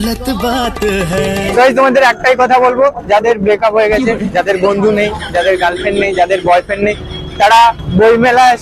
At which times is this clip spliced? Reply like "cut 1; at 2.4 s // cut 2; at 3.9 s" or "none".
cut 1; at 1.5 s

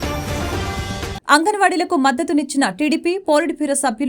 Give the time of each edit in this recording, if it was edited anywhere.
cut 1; at 1.1 s

